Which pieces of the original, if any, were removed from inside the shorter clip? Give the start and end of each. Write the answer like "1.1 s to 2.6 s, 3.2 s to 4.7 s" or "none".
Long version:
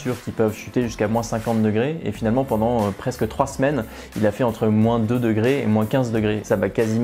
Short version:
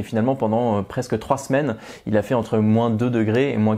none